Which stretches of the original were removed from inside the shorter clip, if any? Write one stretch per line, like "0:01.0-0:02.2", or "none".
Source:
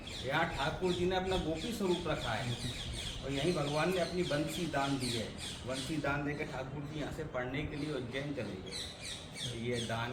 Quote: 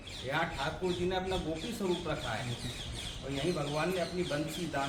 none